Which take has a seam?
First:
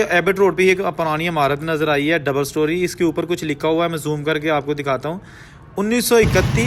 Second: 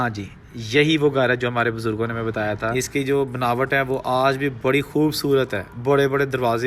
second; 1 cut; at 2.7 s

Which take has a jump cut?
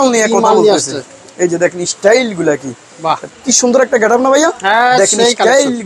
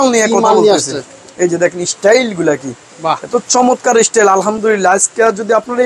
first; 1 cut; at 3.2 s

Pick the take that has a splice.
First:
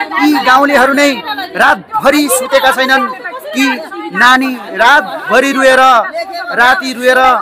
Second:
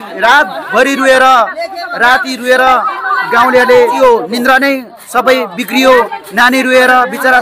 second; 1 cut; at 4.0 s

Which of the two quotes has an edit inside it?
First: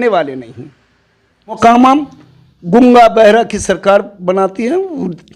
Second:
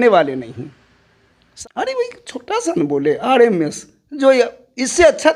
first; 1 cut; at 1.6 s

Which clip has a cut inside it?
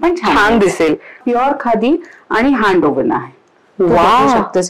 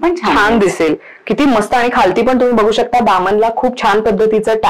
first; 1 cut; at 1.2 s

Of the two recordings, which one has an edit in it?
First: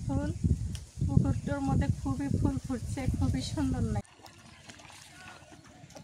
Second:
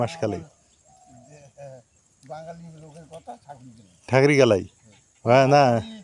first; 1 cut; at 4.0 s

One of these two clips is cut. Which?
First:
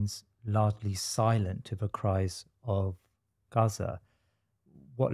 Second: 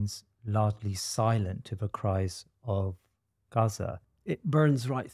second; 1 cut; at 4.1 s

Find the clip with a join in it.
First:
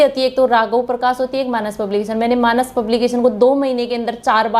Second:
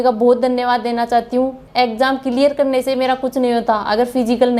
second; 1 cut; at 1.6 s

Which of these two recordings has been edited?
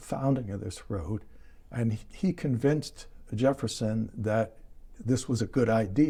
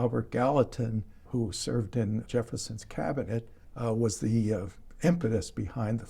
second; 3 cuts; at 1.2 s, 2.3 s, 3.6 s

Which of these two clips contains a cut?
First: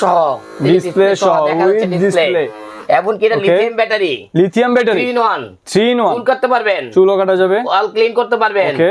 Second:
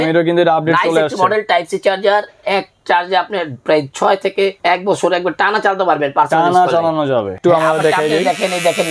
second; 2 cuts; at 4.6 s, 7.4 s

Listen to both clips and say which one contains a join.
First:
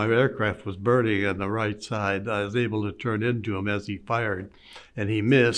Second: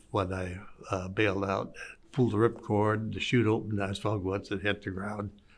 second; 1 cut; at 2.0 s

